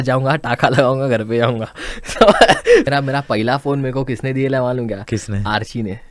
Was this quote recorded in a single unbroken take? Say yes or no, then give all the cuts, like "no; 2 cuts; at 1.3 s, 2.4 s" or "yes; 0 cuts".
no; 1 cut; at 2.9 s